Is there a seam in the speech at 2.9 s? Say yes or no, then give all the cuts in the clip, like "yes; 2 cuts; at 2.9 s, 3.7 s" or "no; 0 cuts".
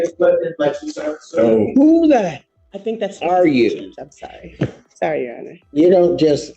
no; 2 cuts; at 4.8 s, 5.6 s